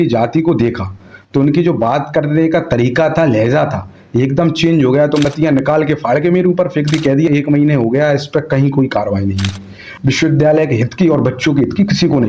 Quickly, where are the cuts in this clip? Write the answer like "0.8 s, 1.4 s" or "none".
5.2 s, 7.3 s, 9.9 s